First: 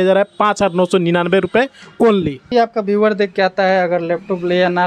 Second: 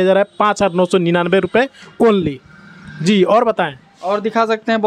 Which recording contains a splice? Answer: first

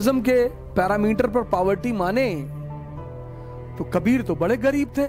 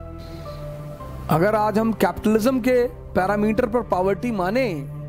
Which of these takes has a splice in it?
second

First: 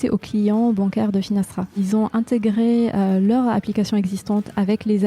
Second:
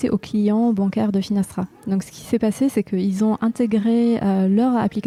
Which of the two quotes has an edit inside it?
first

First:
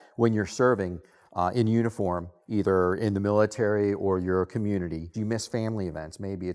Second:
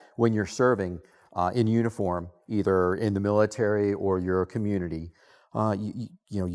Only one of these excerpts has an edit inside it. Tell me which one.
first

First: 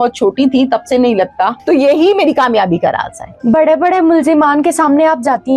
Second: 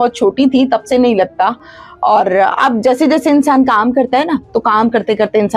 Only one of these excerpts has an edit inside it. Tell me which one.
first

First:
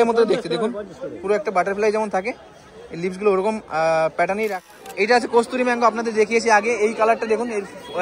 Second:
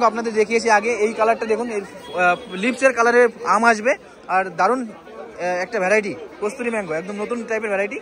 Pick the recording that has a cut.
first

